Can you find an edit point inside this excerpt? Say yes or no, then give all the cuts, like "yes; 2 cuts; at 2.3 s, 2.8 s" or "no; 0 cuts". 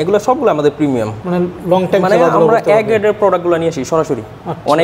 no; 0 cuts